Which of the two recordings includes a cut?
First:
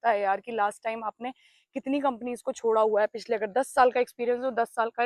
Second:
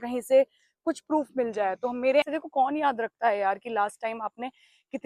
second; 1 cut; at 2.2 s

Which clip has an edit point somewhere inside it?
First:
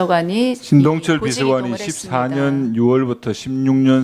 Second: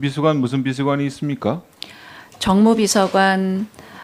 first; 1 cut; at 3.0 s

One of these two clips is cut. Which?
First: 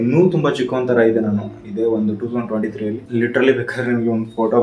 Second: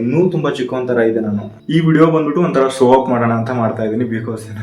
second; 1 cut; at 1.5 s

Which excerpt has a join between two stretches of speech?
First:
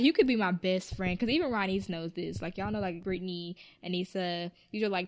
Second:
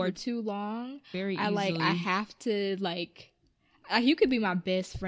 first; 1 cut; at 3.0 s

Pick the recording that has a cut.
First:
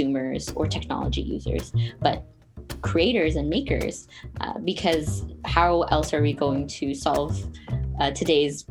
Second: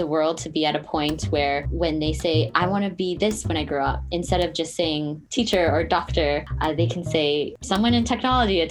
second; 4 cuts; at 1.7 s, 5.2 s, 6.5 s, 7.6 s

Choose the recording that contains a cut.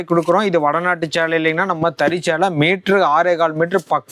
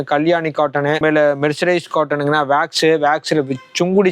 second; 1 cut; at 1.0 s

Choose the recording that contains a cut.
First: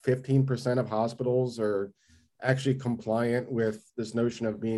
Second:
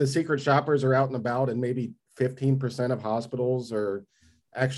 first; 1 cut; at 3.9 s

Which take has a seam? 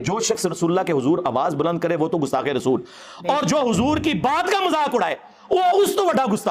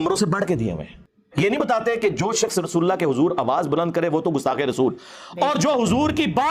second; 1 cut; at 1.2 s

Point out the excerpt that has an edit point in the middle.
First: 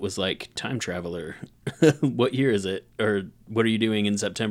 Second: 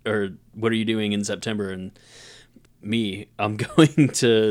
second; 1 cut; at 2.5 s

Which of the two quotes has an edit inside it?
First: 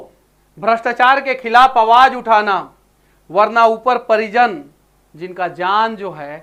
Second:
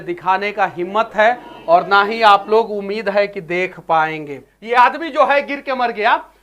second; 1 cut; at 4.5 s

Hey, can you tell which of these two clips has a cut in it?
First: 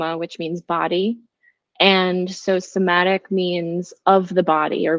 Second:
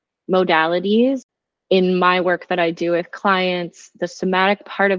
second; 1 cut; at 1.4 s

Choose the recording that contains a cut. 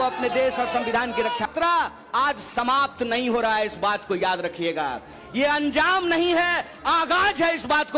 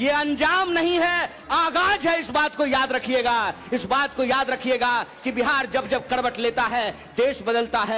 first; 1 cut; at 1.5 s

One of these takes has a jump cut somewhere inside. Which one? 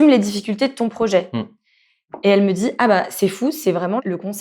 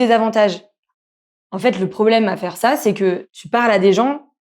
second; 1 cut; at 3.3 s

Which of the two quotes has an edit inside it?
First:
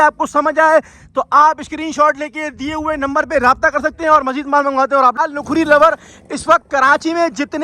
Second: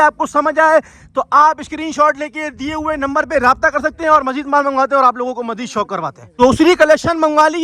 first; 1 cut; at 5.2 s

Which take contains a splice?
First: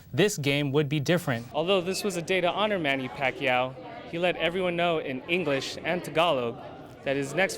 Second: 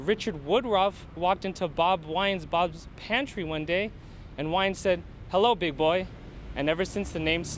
first; 1 cut; at 1.4 s

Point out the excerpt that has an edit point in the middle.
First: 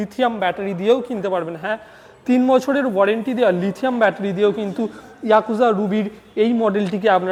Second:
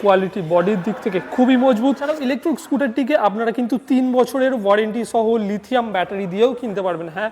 second; 1 cut; at 2.2 s

